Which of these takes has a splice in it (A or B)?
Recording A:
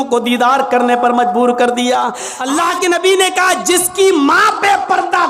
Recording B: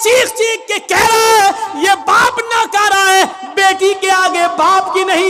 A